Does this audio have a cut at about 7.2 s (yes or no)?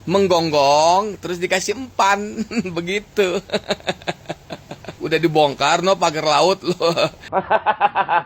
yes